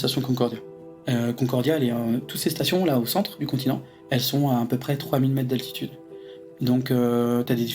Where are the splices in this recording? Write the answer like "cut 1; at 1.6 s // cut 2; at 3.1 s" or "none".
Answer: cut 1; at 0.8 s // cut 2; at 3.9 s